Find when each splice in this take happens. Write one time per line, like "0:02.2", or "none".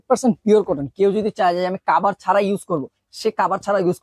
none